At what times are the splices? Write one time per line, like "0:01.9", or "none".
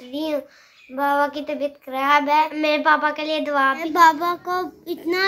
0:02.5
0:03.8